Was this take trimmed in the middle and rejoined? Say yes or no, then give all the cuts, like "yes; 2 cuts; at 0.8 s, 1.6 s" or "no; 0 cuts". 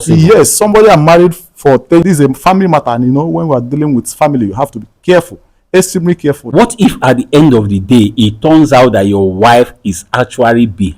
yes; 2 cuts; at 2.0 s, 6.4 s